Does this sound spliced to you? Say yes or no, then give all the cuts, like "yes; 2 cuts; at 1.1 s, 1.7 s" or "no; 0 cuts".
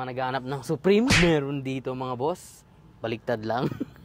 no; 0 cuts